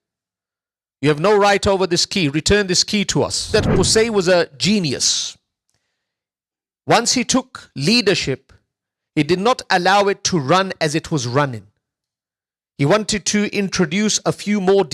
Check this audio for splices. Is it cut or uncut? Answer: cut